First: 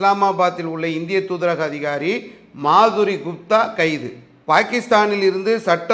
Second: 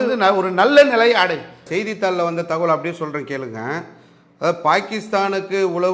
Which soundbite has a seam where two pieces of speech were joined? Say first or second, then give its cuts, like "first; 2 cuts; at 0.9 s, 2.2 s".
second; 1 cut; at 1.6 s